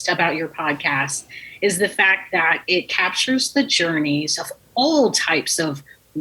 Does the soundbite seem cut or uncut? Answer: uncut